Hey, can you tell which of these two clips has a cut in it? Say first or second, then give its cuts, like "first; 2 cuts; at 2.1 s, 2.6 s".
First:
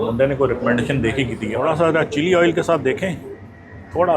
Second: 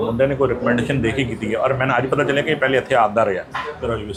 first; 1 cut; at 1.5 s